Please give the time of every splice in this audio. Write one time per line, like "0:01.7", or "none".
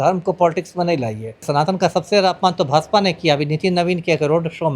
0:01.4